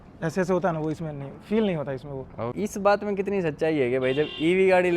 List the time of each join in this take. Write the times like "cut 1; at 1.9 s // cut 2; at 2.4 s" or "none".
cut 1; at 2.5 s